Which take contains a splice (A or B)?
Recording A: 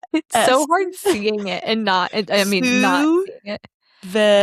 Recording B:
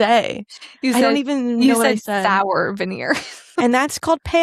B